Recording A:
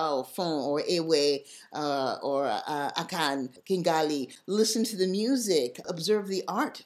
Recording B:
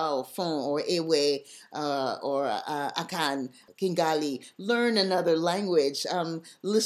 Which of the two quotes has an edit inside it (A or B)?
A